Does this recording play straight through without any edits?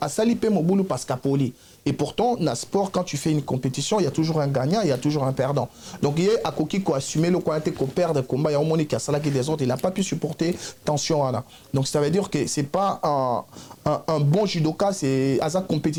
yes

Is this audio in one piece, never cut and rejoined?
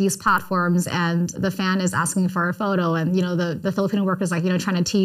no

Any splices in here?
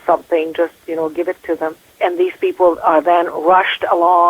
yes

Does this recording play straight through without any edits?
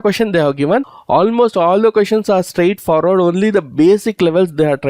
no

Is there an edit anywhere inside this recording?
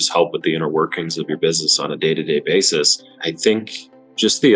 yes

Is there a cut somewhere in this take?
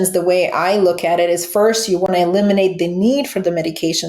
no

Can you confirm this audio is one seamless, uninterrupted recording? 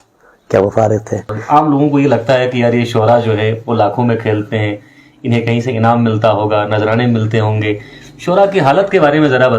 no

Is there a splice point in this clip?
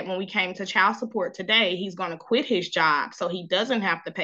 no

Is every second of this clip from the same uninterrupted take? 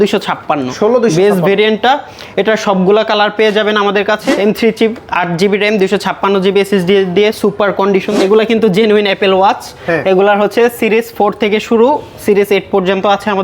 no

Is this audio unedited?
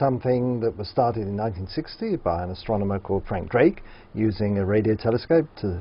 no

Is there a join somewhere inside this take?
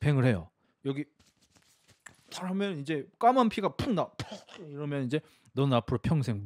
no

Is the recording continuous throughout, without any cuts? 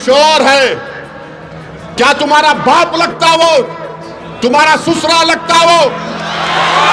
yes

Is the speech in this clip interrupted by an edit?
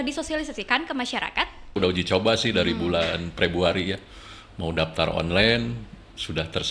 yes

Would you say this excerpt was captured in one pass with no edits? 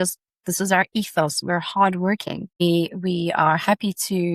no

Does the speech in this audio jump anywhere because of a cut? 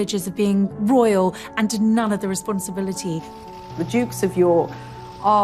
no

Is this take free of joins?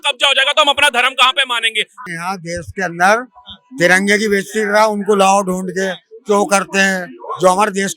no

